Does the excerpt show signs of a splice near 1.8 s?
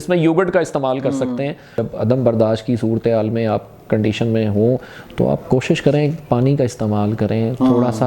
yes; 1 cut; at 1.8 s

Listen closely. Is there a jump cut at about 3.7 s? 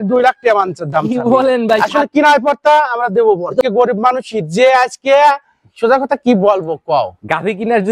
yes; 1 cut; at 3.7 s

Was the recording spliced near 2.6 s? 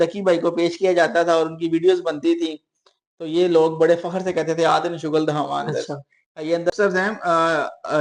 no; 1 cut; at 6.7 s

